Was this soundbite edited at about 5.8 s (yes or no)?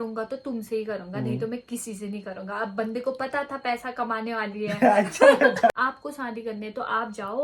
yes